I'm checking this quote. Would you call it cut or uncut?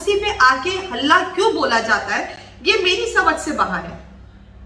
uncut